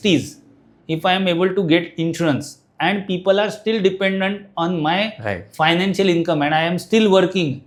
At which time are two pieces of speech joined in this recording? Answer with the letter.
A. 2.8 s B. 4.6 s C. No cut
C